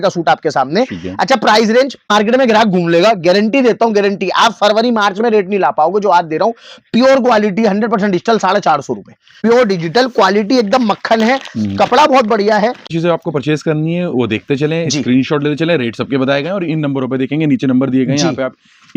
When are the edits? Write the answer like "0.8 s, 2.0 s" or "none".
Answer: 2.1 s, 9.2 s, 12.9 s

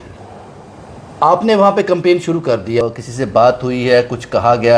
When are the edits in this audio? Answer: 2.8 s

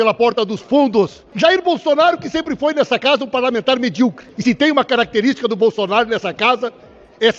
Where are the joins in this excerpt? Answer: 1.2 s, 4.3 s

